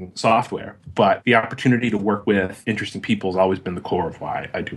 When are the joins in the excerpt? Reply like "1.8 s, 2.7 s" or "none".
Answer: 1.2 s, 2.3 s

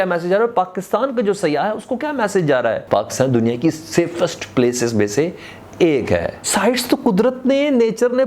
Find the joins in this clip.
2.8 s, 6.5 s

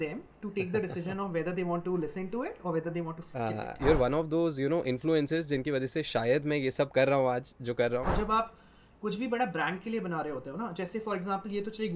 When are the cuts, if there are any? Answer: 3.8 s, 8.1 s

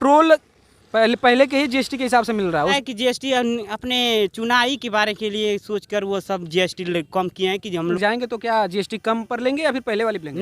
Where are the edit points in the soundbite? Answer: 2.7 s, 8.0 s

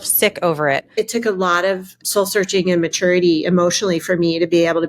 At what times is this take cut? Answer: 0.9 s, 2.0 s

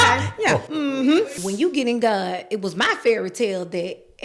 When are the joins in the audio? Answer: 1.3 s

